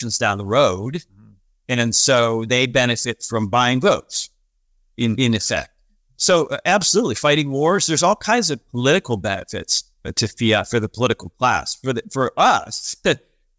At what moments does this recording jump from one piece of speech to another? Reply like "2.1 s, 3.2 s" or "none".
none

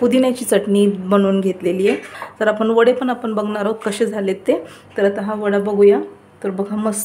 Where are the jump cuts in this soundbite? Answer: 2.2 s

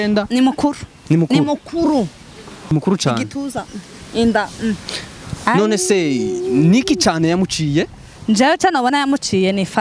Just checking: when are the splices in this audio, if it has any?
2.7 s

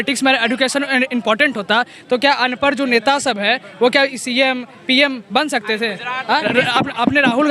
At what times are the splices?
6.4 s

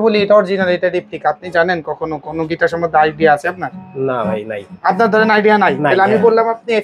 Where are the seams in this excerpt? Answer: none

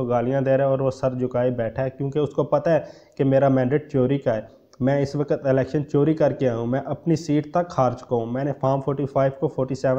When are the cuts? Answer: none

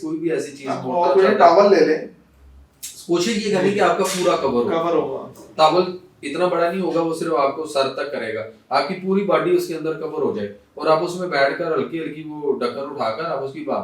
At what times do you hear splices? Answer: none

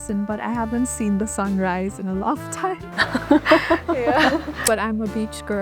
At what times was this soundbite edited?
4.6 s

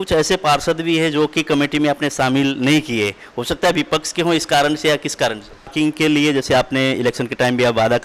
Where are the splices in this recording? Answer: 5.7 s

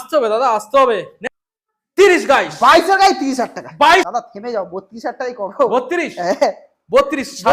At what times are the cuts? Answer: 1.1 s, 4.1 s

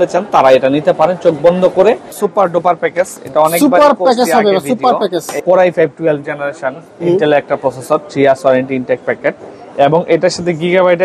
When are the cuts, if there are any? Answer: 2.1 s, 5.3 s

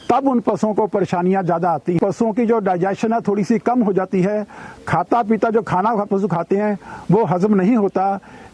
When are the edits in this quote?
2.0 s

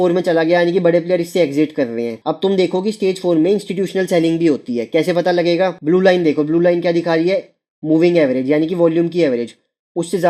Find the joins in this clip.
none

